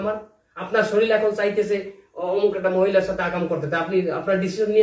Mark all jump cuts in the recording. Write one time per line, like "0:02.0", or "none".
none